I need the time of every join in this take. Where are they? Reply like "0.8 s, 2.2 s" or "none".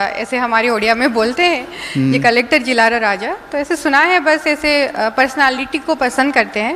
none